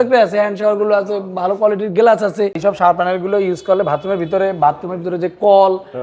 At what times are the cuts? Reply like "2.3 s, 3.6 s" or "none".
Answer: 2.6 s